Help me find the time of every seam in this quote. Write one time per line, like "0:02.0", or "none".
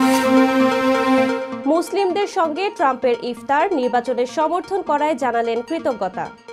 0:01.5